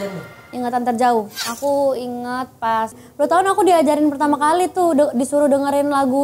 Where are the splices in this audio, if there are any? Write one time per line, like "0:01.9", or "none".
0:03.0

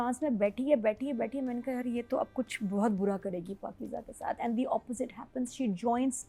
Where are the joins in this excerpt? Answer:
none

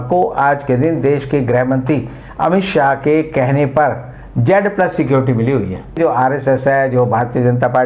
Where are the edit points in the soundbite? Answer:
0:06.0

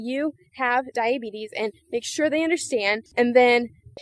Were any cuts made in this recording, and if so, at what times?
0:03.0

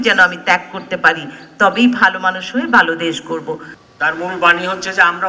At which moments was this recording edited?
0:03.7

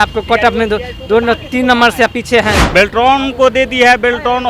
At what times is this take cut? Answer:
0:02.6

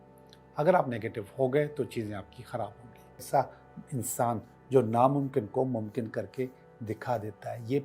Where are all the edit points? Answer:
0:03.2

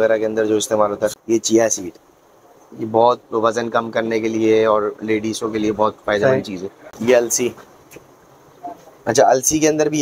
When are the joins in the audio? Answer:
0:01.1
0:07.0

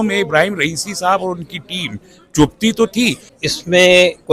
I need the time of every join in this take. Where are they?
0:03.3

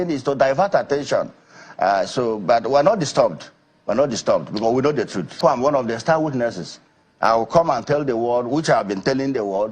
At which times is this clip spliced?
0:05.4

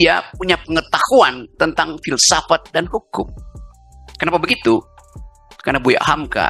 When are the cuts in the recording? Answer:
none

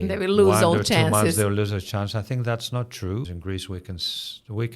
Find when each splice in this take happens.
0:03.3

